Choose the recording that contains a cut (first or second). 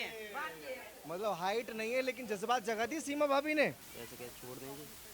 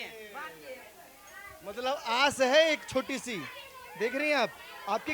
first